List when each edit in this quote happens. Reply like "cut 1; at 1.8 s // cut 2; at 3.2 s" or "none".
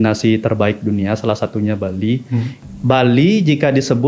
cut 1; at 2.5 s